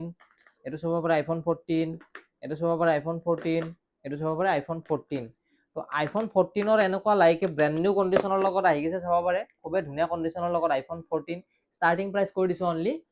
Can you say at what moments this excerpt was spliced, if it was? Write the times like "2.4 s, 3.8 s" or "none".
none